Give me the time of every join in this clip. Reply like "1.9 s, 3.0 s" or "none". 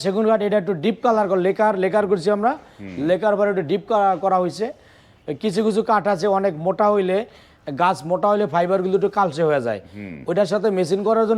none